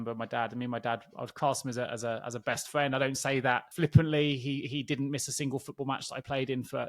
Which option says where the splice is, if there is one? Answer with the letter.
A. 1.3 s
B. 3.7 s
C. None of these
B